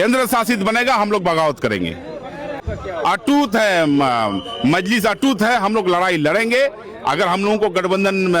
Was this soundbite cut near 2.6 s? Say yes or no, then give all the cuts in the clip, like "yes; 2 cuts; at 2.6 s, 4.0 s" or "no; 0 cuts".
yes; 1 cut; at 2.6 s